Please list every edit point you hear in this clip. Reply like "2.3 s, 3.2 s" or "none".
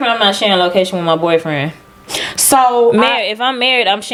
none

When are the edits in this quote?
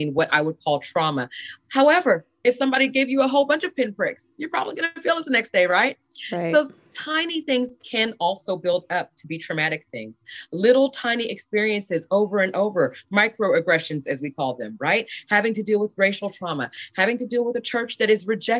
none

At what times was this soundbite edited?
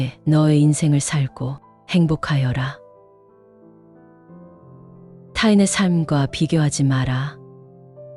none

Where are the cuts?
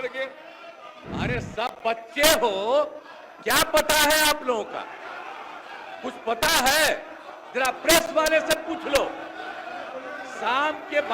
0.9 s

